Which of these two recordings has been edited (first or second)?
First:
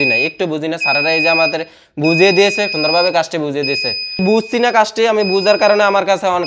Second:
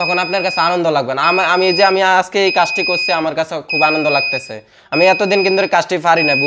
first